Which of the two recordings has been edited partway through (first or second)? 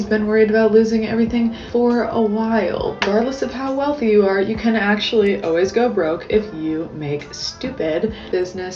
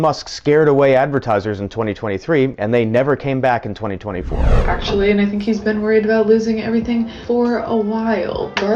second